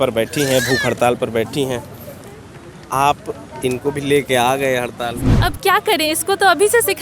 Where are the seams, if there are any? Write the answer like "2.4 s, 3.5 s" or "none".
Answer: 5.3 s